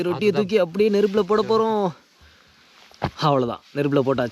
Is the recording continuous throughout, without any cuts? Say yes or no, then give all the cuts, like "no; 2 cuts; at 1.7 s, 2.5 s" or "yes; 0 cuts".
yes; 0 cuts